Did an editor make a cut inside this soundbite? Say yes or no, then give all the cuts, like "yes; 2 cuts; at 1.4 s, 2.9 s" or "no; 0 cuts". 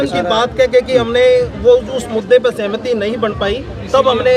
no; 0 cuts